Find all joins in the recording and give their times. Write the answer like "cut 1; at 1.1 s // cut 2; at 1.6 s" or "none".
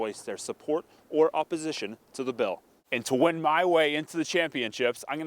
cut 1; at 2.8 s